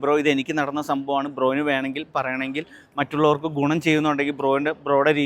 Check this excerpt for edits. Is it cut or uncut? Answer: uncut